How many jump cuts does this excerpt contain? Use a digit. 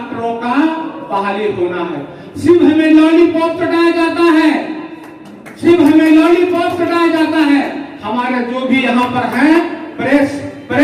0